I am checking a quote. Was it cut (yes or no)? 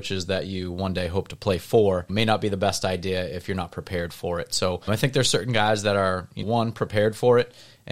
no